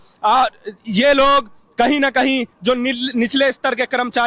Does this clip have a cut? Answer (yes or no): no